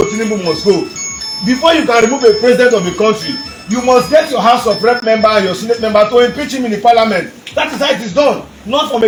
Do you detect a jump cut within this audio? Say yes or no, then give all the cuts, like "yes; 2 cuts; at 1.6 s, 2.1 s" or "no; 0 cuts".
no; 0 cuts